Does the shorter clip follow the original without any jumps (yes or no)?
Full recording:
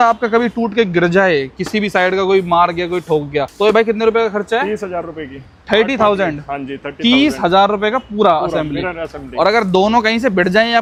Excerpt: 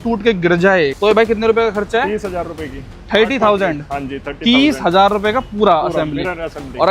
no